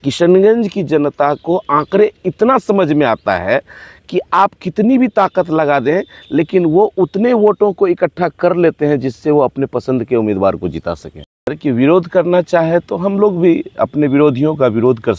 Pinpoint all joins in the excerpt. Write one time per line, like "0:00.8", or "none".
0:11.6